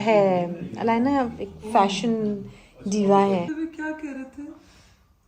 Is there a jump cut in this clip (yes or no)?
yes